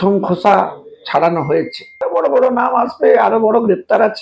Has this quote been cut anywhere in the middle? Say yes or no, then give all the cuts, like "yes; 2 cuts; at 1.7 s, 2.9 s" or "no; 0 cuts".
yes; 1 cut; at 2.1 s